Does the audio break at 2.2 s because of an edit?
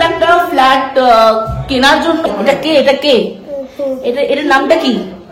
yes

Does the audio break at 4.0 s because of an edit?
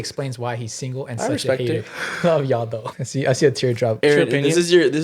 yes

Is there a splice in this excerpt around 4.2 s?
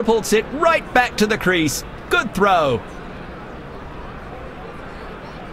no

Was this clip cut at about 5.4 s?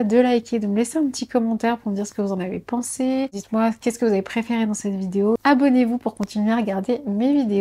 yes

